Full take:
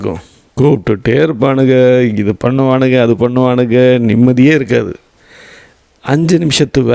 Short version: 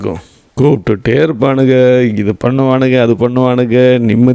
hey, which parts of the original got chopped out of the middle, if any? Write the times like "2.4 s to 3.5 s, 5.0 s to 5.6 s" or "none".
none